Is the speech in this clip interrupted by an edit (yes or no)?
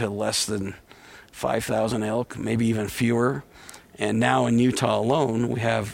no